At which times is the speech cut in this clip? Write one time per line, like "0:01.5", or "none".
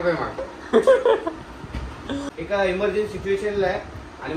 0:02.3